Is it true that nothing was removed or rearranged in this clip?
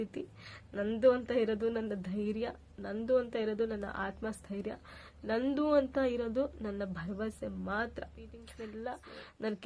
no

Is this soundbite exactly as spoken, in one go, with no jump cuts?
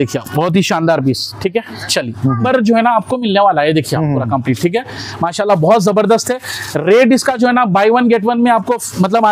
no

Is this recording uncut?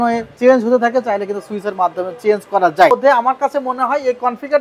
no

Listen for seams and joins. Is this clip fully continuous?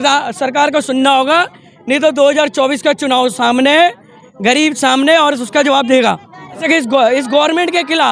no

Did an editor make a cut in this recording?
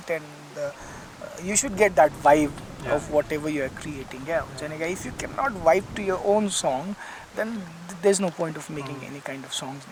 no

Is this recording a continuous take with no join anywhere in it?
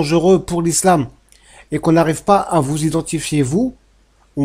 yes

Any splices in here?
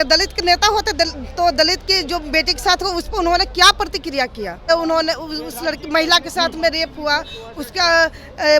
yes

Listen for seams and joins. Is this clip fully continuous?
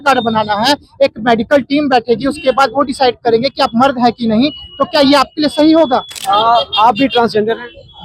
no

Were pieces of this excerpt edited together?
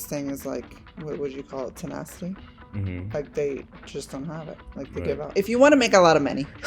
yes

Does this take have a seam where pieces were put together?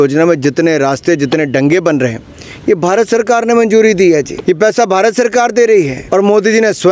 yes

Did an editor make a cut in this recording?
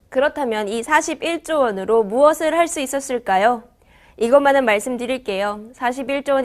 no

